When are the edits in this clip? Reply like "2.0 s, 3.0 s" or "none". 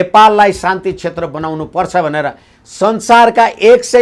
none

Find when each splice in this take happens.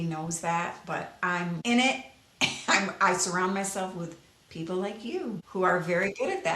1.6 s, 5.4 s

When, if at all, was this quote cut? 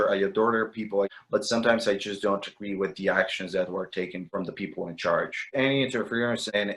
1.1 s, 5.4 s

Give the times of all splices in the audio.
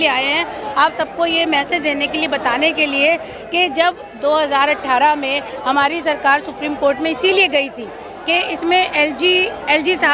none

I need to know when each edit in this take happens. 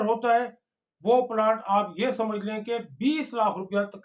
none

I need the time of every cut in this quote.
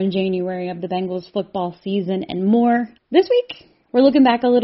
3.0 s

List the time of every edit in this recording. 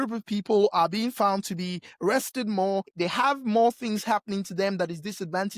2.9 s

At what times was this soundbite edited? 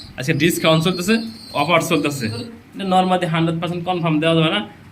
2.6 s

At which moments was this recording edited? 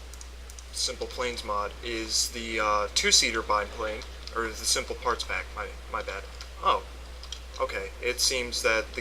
1.8 s

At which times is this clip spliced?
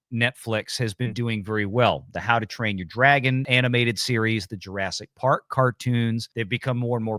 6.3 s

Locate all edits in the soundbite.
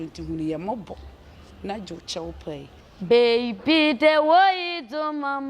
2.8 s

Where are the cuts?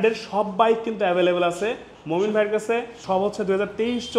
3.0 s

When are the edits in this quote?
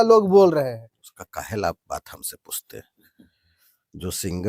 none

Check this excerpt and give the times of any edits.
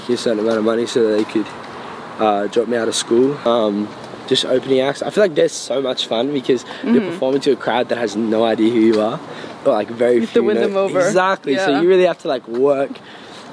3.4 s

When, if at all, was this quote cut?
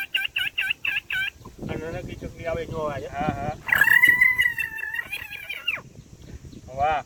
none

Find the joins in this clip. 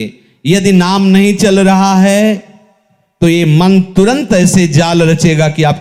none

